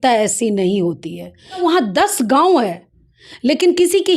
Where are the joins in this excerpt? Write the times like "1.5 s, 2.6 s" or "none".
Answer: 1.6 s